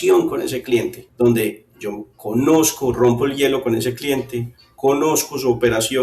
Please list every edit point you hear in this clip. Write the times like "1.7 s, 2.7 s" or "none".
1.0 s